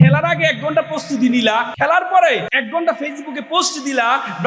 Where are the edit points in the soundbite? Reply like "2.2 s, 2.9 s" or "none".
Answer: 1.7 s, 2.5 s